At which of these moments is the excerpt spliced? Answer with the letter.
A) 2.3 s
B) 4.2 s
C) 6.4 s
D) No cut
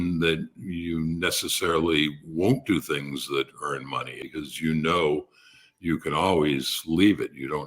B